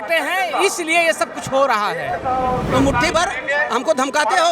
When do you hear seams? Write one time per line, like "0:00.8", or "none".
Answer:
0:02.7